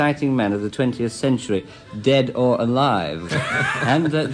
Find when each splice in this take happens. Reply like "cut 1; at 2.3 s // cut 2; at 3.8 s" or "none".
cut 1; at 3.2 s